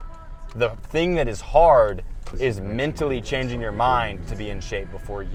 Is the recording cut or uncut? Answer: uncut